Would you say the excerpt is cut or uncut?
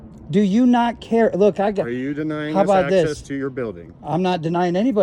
uncut